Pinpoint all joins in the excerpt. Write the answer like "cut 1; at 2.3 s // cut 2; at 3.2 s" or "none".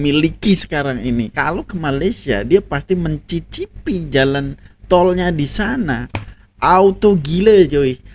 cut 1; at 1.3 s